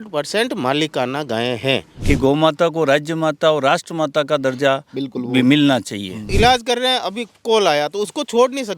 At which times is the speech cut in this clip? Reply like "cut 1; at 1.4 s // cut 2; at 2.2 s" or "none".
cut 1; at 1.9 s // cut 2; at 6.3 s